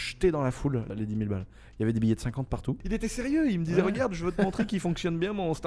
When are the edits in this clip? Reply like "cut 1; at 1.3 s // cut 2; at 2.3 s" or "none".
cut 1; at 0.9 s // cut 2; at 2.8 s